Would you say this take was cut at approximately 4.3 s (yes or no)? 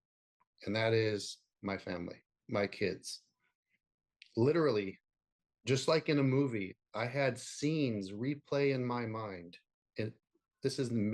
no